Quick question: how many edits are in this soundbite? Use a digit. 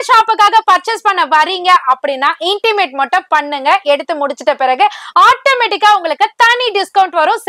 0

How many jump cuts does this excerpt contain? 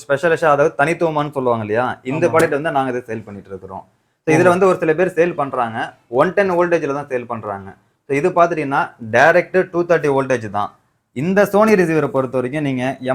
0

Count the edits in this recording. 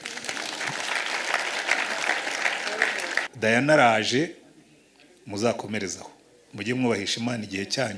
1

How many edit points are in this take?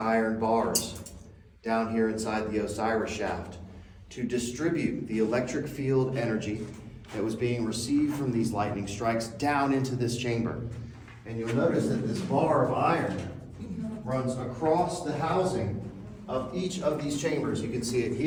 0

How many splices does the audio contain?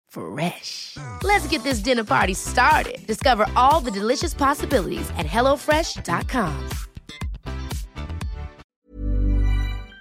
1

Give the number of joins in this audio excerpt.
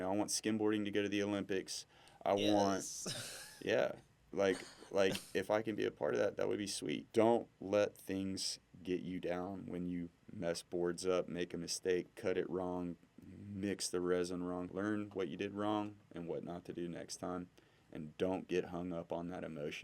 2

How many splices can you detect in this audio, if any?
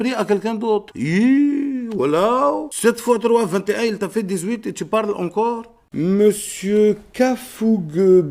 2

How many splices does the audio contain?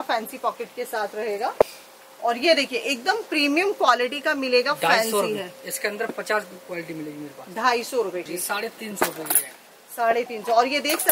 2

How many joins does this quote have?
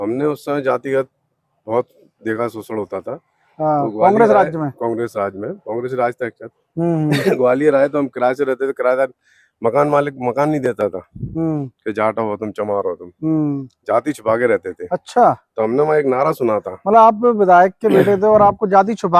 0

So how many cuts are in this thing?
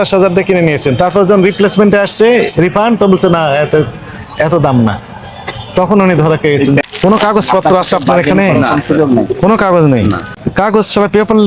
2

